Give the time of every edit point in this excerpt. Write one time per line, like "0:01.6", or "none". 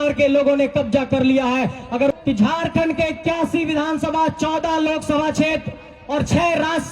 0:02.1